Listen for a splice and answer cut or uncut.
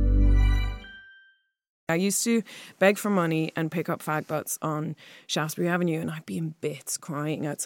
cut